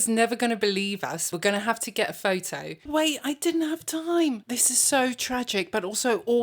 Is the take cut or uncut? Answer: cut